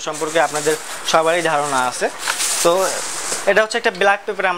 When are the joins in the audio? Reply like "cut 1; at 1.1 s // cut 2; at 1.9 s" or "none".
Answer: none